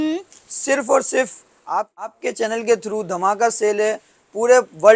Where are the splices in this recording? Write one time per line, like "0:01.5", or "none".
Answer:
none